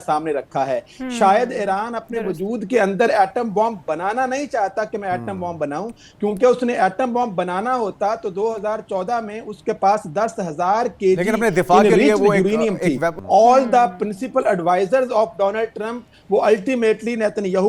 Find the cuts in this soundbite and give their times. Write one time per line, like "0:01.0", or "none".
0:13.1